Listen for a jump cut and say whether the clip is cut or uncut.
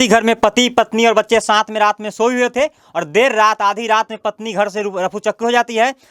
uncut